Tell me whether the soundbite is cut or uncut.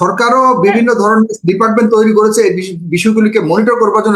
uncut